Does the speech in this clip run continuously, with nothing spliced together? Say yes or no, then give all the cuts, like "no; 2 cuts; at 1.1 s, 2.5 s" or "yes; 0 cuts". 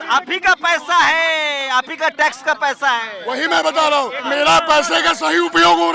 no; 1 cut; at 4.2 s